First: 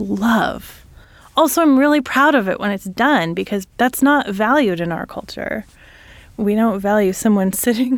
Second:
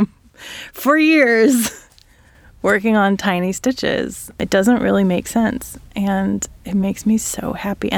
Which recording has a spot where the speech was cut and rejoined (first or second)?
first